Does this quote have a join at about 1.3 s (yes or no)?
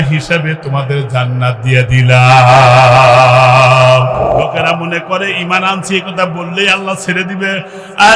no